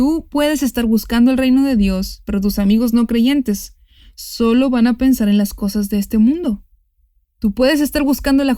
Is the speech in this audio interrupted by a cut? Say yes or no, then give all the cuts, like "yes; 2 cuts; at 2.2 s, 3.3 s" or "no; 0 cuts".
no; 0 cuts